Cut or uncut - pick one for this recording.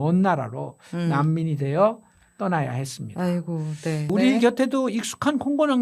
cut